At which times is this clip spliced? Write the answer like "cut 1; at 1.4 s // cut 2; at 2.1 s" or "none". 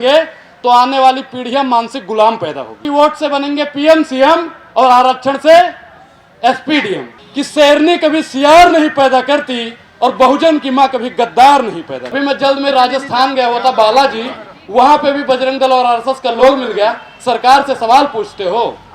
cut 1; at 2.8 s // cut 2; at 7.2 s // cut 3; at 12.1 s

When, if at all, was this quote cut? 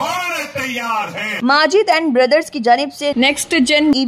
cut 1; at 1.4 s

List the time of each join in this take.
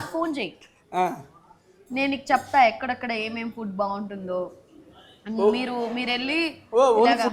none

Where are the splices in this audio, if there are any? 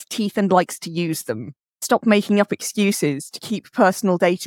cut 1; at 1.8 s

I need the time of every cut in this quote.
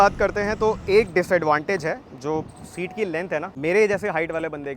cut 1; at 3.5 s

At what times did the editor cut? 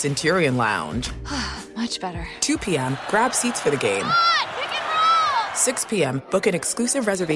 none

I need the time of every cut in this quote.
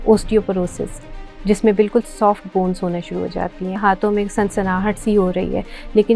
cut 1; at 3.8 s

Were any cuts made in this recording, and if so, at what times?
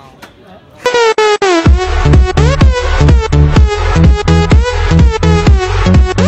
none

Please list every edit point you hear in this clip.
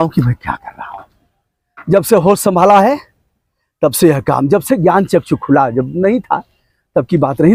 none

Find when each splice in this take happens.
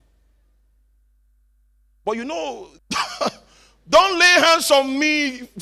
cut 1; at 2.7 s

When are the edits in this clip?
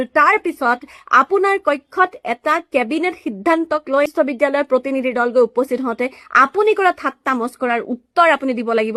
none

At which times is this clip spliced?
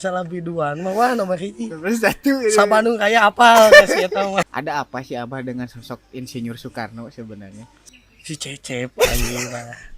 cut 1; at 4.5 s // cut 2; at 7.8 s

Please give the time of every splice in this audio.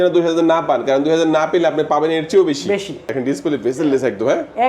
cut 1; at 3.1 s

